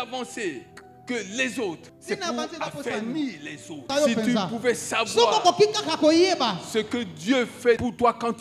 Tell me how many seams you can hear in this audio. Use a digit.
2